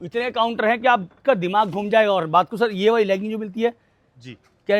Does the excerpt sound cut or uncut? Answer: uncut